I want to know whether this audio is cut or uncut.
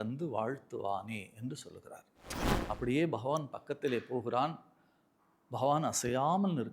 cut